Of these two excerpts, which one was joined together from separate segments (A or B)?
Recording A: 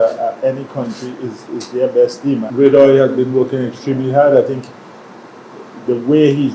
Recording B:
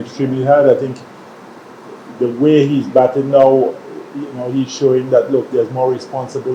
A